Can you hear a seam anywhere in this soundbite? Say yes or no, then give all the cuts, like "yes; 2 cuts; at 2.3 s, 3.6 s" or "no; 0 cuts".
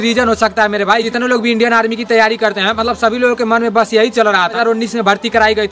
yes; 2 cuts; at 1.1 s, 4.6 s